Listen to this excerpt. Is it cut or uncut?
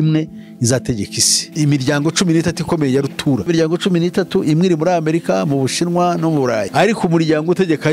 cut